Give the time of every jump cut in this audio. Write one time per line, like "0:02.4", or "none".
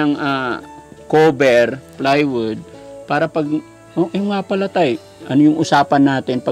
none